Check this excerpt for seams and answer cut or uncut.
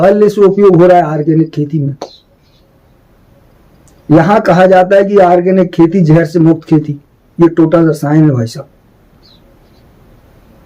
uncut